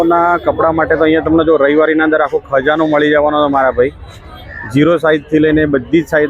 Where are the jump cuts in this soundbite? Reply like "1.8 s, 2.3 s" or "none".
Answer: none